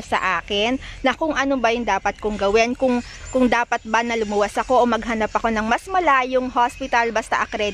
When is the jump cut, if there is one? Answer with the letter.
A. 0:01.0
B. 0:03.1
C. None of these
C